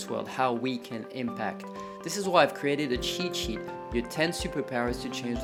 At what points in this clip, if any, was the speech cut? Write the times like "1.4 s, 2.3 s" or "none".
none